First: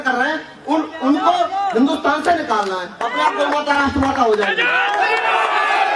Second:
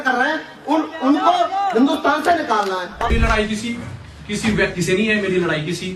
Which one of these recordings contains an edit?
second; 1 cut; at 3.1 s

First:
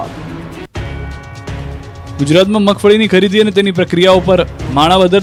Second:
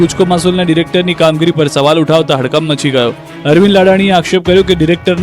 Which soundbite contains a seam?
second; 1 cut; at 3.5 s

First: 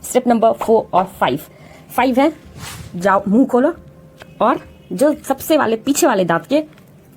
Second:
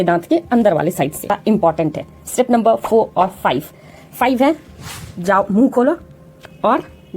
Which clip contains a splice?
second; 1 cut; at 1.3 s

